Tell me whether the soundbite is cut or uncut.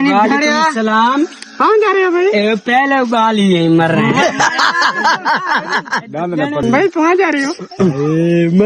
cut